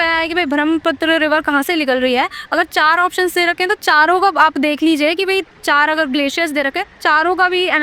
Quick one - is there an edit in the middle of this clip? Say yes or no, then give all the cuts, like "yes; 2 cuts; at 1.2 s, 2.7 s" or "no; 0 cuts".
no; 0 cuts